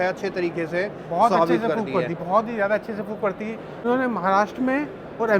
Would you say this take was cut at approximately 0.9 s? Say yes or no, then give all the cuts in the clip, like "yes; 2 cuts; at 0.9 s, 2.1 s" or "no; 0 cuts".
no; 1 cut; at 3.7 s